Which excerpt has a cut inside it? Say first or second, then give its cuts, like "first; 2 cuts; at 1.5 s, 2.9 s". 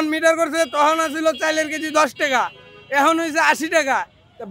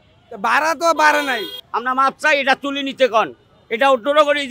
second; 1 cut; at 1.6 s